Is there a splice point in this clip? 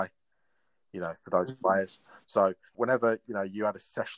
yes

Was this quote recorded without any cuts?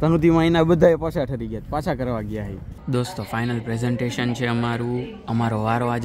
no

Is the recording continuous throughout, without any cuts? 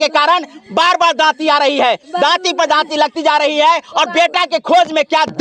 yes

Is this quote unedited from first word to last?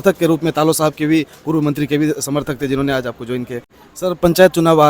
no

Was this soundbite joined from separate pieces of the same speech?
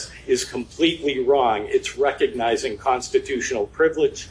no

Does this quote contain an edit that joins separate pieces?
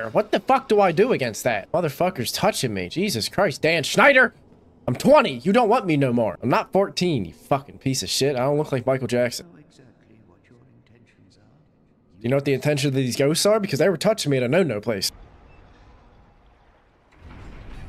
no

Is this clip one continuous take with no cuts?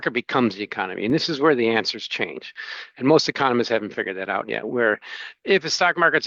yes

